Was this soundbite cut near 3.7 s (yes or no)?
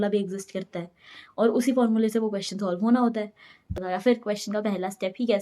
yes